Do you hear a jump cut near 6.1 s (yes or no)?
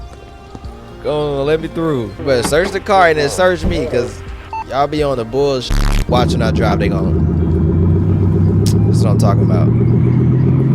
yes